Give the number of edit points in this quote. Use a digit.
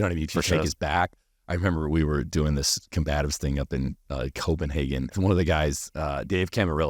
1